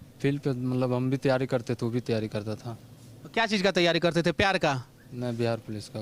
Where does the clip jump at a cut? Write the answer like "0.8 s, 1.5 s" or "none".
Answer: none

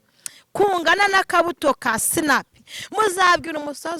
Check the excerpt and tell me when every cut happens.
none

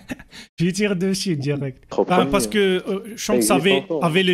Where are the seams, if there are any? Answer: 1.8 s

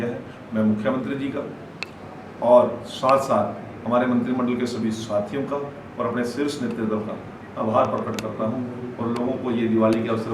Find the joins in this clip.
none

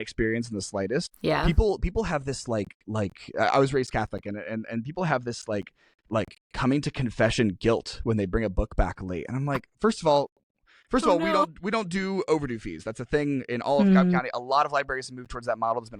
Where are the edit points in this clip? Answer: 1.1 s

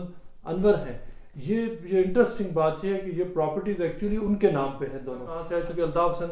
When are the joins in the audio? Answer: 5.4 s

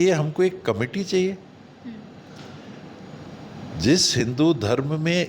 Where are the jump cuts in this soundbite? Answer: none

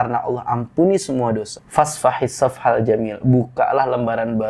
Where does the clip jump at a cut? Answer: 1.6 s

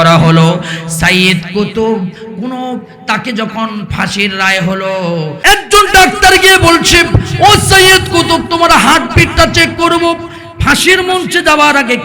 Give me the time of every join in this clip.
5.3 s

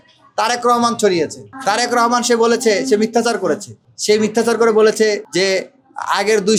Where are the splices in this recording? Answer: none

